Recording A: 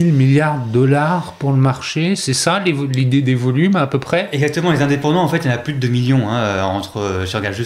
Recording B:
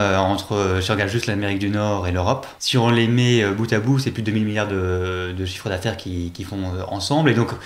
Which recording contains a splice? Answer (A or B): B